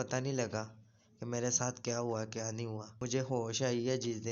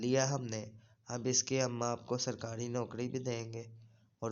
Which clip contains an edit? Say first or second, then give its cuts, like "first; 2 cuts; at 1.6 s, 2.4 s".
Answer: first; 1 cut; at 2.9 s